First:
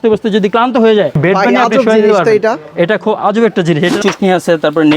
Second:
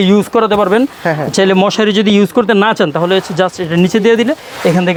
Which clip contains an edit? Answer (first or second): first